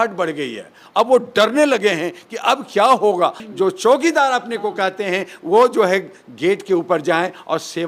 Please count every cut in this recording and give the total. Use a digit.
1